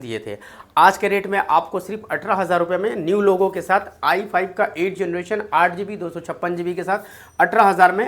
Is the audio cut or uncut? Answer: uncut